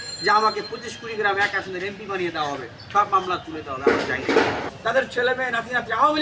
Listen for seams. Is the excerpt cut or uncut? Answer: cut